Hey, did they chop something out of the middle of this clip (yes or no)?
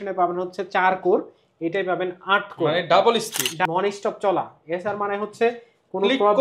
yes